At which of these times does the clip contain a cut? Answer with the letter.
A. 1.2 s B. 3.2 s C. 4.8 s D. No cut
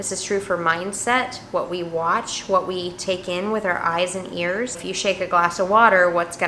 C